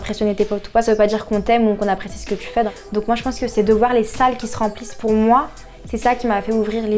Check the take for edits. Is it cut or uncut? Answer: cut